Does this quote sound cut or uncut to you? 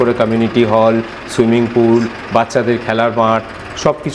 uncut